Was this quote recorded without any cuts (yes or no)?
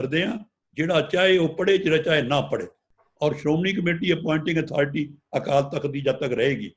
no